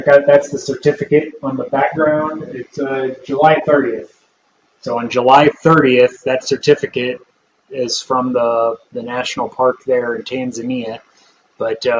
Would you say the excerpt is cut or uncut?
uncut